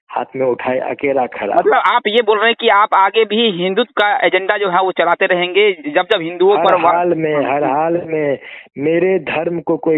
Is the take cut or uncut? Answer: uncut